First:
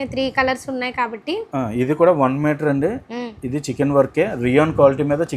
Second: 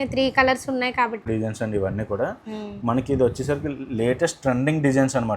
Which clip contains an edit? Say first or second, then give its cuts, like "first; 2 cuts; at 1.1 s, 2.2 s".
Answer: second; 1 cut; at 1.2 s